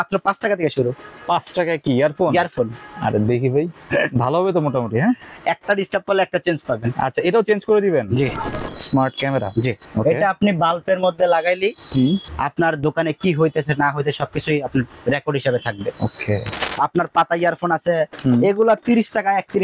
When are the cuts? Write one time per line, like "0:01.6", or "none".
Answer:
0:08.6
0:09.8
0:12.3
0:16.6
0:18.1